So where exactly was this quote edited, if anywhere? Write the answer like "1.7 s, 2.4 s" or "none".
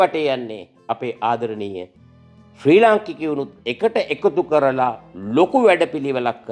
none